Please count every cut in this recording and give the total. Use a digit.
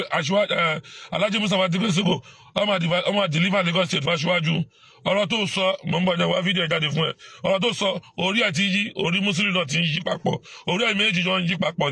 0